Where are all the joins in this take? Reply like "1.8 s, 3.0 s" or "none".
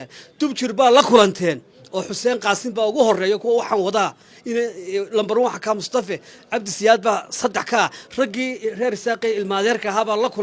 none